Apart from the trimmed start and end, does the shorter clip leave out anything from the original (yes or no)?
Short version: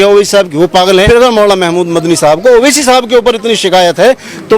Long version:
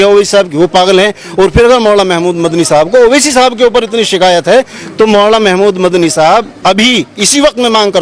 yes